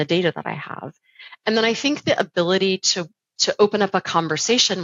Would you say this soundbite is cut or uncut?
uncut